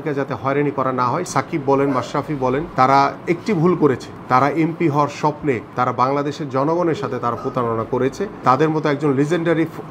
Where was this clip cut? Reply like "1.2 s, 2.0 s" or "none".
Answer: 1.3 s, 2.7 s, 4.1 s, 5.7 s, 8.4 s